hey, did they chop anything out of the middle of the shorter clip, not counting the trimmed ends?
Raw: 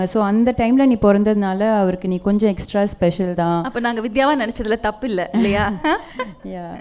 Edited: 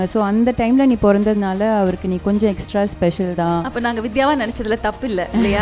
no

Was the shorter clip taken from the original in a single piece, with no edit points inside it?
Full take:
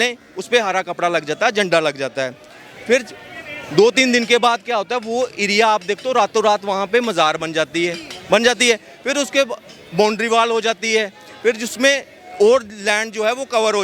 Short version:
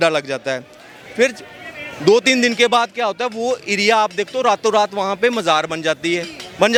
yes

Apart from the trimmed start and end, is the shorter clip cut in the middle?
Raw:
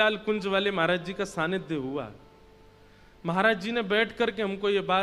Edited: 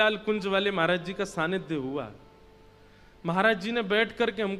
no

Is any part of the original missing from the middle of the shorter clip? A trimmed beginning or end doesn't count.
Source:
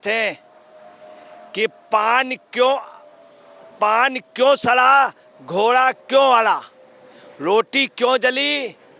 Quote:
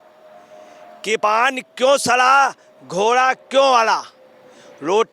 yes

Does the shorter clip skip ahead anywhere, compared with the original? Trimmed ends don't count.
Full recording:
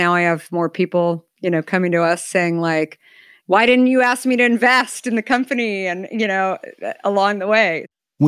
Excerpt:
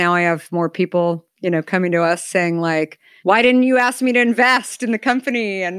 yes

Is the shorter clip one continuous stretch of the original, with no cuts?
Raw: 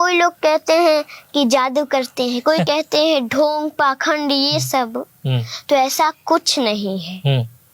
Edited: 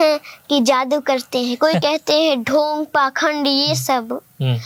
yes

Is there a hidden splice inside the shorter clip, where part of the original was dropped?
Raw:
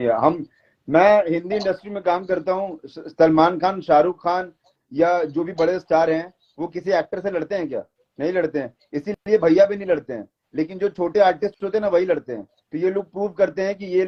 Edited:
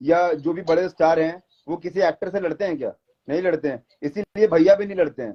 no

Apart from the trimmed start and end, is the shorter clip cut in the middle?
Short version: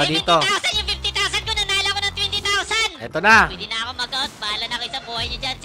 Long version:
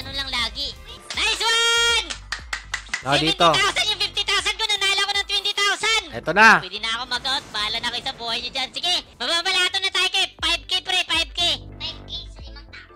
no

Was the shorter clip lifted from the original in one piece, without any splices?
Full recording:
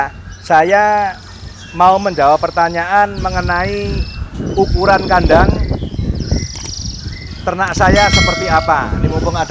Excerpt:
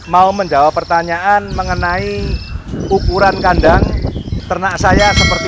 no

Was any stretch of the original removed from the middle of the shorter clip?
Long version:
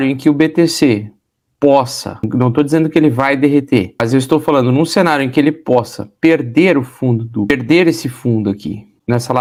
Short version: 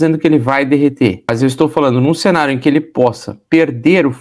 no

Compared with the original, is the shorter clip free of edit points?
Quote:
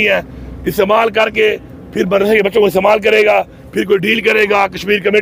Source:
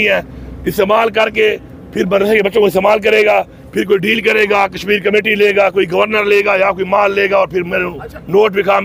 yes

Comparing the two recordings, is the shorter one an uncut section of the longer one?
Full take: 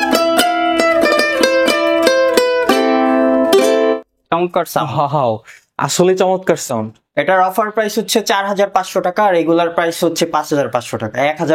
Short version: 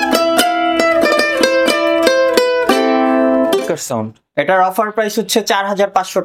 no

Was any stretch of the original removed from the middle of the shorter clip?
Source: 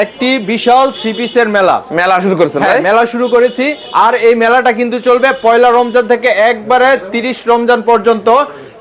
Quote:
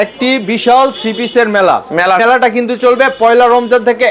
yes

